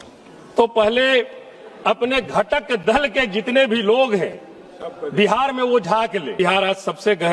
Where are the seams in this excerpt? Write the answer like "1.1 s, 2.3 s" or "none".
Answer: 6.4 s